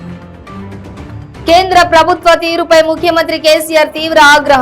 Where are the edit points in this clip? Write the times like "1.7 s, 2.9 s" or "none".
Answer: 0.9 s